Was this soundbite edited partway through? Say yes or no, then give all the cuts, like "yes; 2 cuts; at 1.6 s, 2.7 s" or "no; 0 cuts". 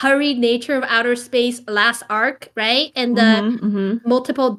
no; 0 cuts